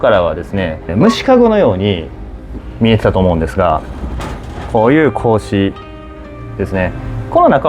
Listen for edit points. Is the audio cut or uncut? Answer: uncut